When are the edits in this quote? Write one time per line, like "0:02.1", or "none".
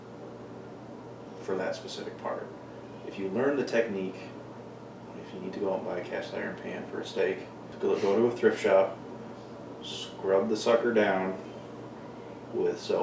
0:07.7

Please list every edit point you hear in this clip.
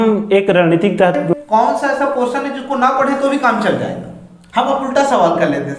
0:01.2

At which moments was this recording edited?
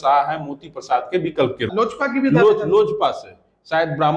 0:01.7

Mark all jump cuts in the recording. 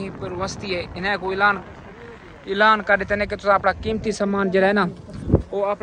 none

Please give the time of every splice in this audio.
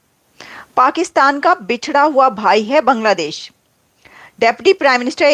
none

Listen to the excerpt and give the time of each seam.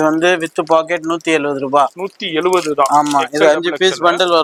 none

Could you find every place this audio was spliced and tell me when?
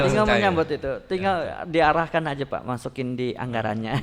none

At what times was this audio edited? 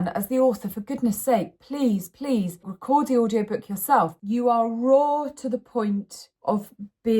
0:02.7
0:04.2

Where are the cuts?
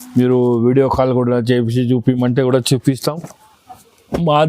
0:03.2

